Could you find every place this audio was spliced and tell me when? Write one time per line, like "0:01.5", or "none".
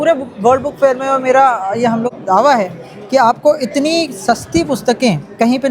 0:02.1